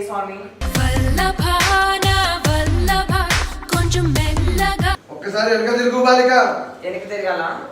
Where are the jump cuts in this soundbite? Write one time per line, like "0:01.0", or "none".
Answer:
0:05.1